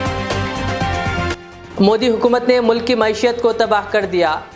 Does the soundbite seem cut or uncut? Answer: uncut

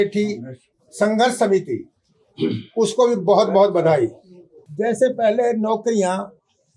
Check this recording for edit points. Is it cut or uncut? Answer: cut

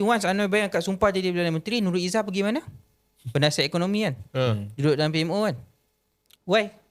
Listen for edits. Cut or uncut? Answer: uncut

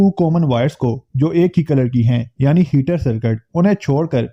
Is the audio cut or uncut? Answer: uncut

